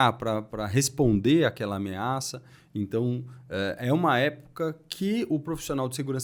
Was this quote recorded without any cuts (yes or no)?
yes